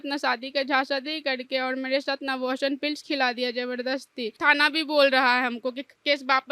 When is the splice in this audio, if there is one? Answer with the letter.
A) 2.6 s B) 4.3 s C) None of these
B